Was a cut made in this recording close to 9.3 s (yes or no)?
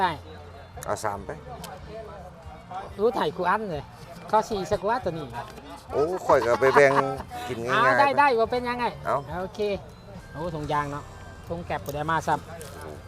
no